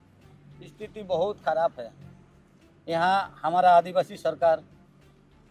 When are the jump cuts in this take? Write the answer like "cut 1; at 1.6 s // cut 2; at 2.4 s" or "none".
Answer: none